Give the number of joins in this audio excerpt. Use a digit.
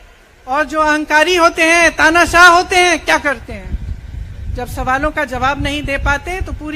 0